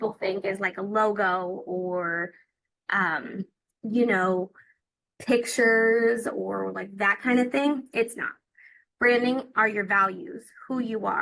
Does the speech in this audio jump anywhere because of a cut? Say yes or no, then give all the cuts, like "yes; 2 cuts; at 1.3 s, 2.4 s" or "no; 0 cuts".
no; 0 cuts